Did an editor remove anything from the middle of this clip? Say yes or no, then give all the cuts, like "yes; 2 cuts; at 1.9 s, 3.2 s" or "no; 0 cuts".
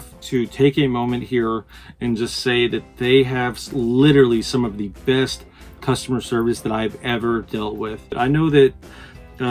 yes; 1 cut; at 8.1 s